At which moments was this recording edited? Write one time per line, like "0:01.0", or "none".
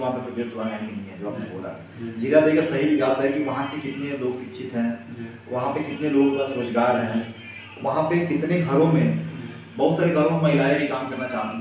none